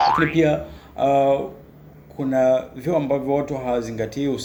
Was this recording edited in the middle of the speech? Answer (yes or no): no